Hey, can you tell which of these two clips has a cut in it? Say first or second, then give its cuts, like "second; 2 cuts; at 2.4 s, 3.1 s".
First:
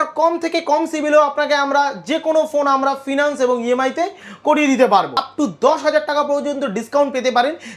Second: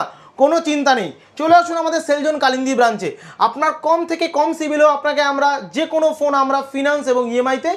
first; 1 cut; at 5.2 s